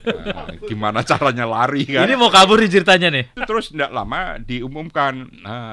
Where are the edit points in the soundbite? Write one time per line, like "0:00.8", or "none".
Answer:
0:03.4